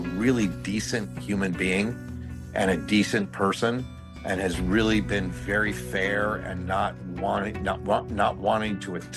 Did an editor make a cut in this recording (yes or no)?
no